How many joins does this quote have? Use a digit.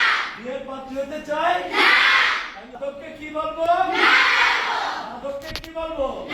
1